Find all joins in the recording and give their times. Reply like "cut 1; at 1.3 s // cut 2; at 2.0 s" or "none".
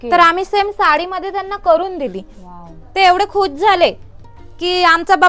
none